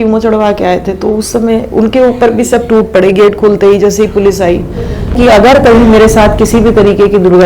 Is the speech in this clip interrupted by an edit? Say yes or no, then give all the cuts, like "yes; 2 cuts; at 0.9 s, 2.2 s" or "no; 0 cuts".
yes; 1 cut; at 5.1 s